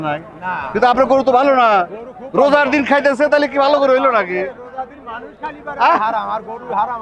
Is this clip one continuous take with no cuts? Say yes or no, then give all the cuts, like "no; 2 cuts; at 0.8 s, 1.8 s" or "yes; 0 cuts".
yes; 0 cuts